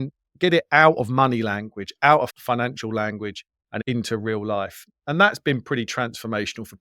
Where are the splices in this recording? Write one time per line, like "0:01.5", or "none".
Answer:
0:03.8